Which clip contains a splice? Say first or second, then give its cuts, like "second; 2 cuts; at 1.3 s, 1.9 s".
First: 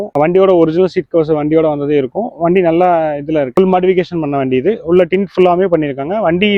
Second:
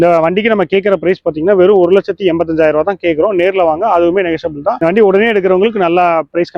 first; 1 cut; at 3.5 s